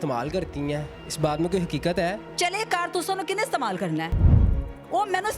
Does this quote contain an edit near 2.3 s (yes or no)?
yes